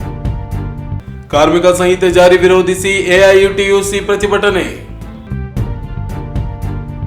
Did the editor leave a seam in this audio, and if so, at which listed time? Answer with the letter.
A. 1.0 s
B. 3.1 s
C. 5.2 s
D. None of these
A